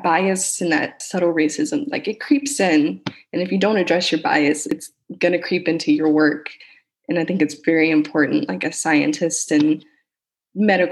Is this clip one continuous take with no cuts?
no; 2 cuts; at 1.0 s, 4.7 s

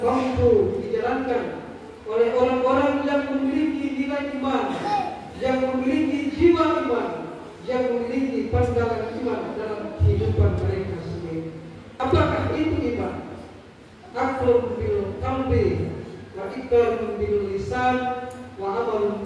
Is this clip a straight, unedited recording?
no; 1 cut; at 11.8 s

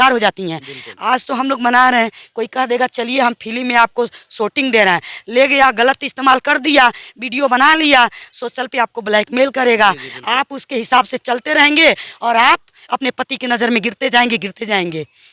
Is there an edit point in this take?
no; 0 cuts

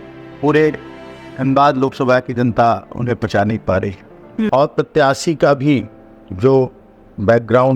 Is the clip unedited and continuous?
no; 1 cut; at 4.5 s

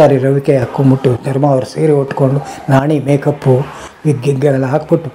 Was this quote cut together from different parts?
no; 0 cuts

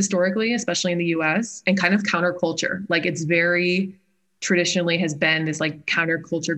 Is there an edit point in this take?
yes; 1 cut; at 1.6 s

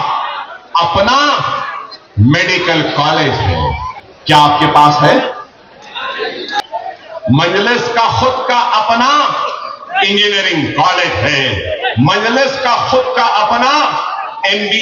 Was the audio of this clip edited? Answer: no; 0 cuts

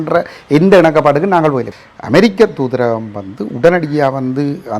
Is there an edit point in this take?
yes; 1 cut; at 1.7 s

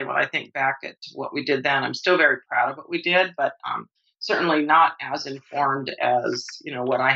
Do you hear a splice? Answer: no; 0 cuts

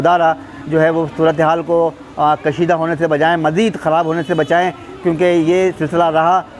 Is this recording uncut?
yes; 0 cuts

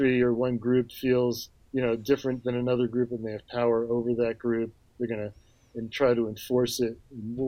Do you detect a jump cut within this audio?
no; 0 cuts

